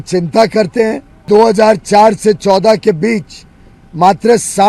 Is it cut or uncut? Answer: cut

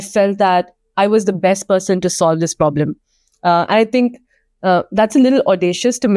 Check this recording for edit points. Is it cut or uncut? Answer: uncut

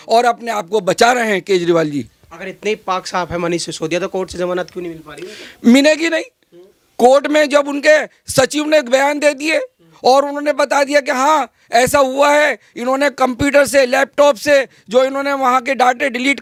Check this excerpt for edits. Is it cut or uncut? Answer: uncut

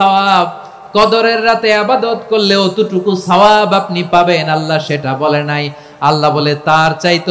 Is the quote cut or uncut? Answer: uncut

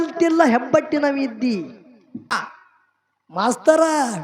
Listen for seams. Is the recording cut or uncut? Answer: cut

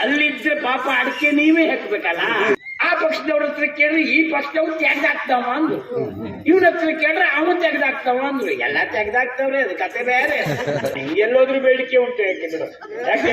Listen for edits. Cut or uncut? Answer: cut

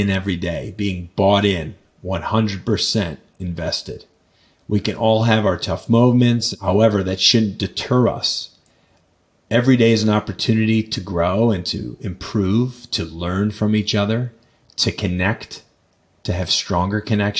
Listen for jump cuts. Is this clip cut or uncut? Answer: cut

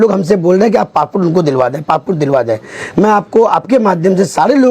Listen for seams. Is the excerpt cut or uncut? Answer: uncut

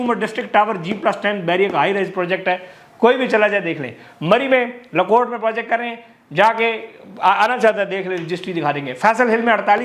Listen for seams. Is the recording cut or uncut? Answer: uncut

